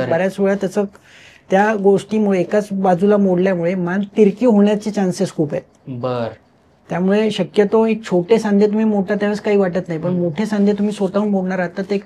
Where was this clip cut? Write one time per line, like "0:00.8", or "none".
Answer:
none

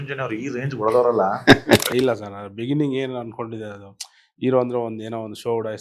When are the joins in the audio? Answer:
0:01.9

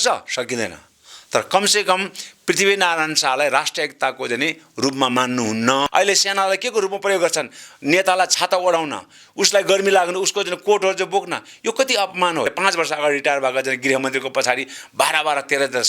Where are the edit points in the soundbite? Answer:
0:05.9
0:12.5

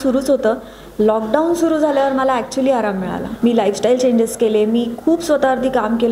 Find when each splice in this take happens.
0:03.3

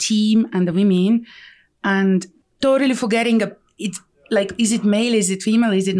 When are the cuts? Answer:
0:02.4

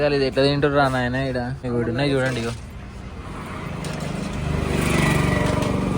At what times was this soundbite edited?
0:01.6

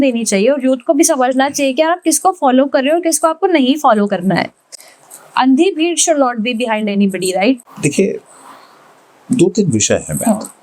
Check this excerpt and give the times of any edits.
none

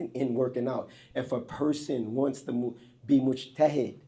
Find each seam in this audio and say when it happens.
none

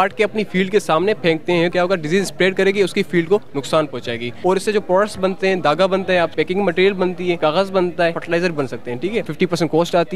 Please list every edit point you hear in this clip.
0:01.7
0:04.3
0:06.3
0:07.4
0:08.2
0:09.3

